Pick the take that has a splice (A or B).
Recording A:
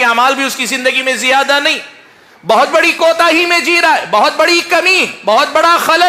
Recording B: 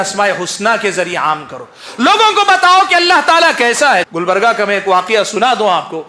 B